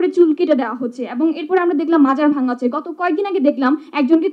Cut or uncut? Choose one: uncut